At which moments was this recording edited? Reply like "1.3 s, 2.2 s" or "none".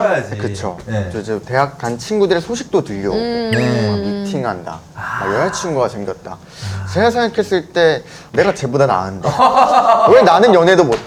none